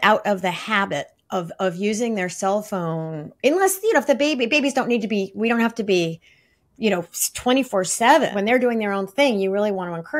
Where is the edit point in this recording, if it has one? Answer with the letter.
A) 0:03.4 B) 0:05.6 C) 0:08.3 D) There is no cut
C